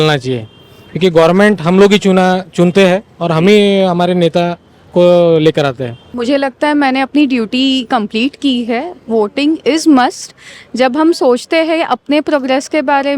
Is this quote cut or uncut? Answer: cut